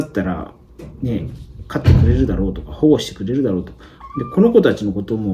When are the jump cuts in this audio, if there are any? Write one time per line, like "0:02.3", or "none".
none